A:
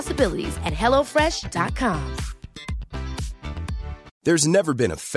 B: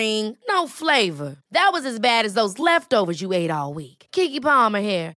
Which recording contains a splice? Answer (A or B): A